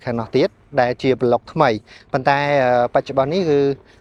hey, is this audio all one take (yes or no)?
yes